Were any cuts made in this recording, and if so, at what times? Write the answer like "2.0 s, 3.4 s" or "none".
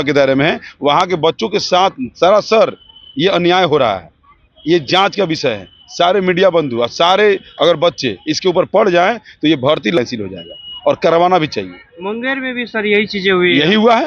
10.0 s